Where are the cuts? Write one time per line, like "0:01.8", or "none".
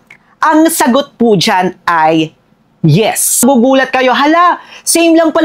0:03.4